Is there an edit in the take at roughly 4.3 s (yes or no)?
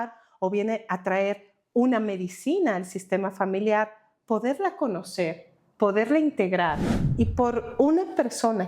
no